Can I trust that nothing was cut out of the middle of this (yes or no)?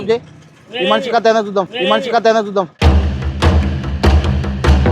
yes